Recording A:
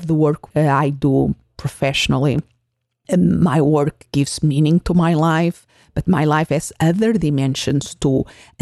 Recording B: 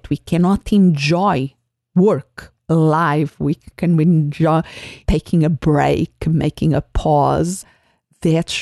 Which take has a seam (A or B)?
B